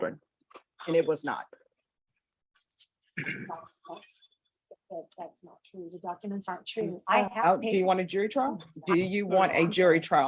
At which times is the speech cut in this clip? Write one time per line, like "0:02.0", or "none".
0:07.3
0:08.7